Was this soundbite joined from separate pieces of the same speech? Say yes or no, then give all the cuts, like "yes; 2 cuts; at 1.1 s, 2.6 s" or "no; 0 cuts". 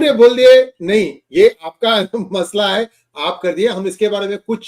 no; 0 cuts